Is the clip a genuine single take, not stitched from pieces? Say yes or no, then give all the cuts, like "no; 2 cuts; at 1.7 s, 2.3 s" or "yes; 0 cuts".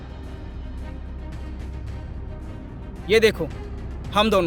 yes; 0 cuts